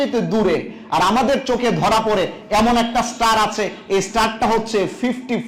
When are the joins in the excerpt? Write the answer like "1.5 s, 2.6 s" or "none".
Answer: none